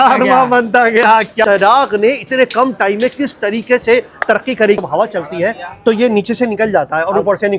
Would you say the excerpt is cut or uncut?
cut